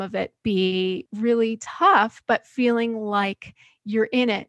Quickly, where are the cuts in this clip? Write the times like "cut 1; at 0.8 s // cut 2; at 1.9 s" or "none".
cut 1; at 1.1 s